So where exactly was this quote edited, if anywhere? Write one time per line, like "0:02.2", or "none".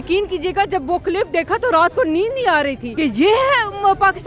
0:02.8